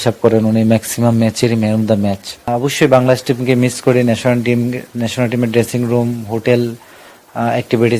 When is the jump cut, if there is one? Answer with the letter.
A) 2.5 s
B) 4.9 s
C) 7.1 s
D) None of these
A